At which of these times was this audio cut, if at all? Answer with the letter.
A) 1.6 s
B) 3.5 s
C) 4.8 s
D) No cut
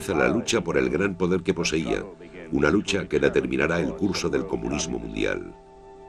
D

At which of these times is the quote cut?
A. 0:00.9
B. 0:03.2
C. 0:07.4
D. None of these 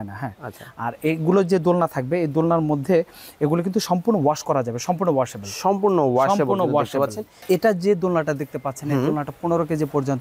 C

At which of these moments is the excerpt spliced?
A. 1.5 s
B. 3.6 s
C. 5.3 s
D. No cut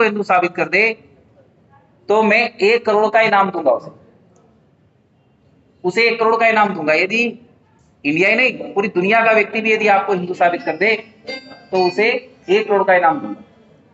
D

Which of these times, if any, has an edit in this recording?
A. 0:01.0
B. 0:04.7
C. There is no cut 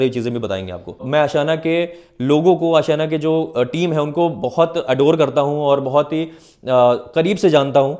A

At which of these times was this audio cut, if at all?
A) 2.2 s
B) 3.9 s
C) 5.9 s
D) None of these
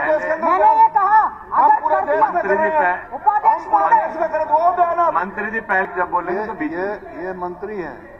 C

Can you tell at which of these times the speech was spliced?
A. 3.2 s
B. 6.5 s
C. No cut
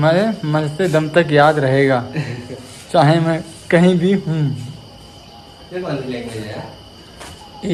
C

